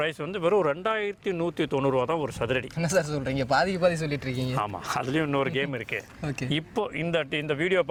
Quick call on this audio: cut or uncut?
uncut